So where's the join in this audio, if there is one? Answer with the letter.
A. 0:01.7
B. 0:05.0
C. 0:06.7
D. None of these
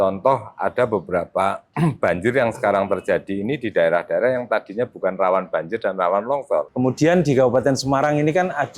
C